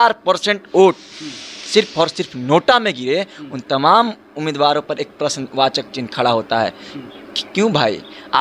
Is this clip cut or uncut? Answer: uncut